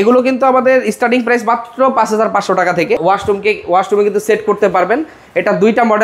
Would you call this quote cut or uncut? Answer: cut